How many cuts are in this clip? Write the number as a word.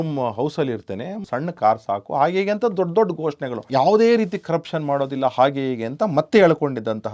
two